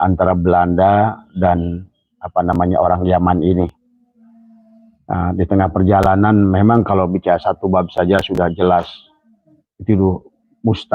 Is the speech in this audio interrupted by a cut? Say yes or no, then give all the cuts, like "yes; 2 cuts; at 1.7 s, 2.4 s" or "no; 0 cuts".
no; 0 cuts